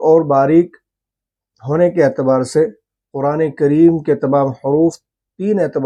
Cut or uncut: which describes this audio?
uncut